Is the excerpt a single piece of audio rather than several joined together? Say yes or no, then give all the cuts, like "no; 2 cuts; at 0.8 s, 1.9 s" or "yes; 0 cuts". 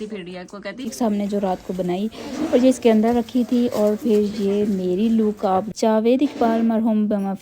no; 2 cuts; at 0.9 s, 5.7 s